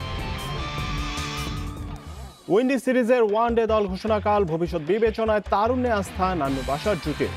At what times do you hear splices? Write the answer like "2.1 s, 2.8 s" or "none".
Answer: 1.0 s